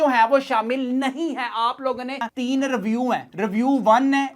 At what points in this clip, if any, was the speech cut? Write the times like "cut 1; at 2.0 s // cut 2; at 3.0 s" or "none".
cut 1; at 2.2 s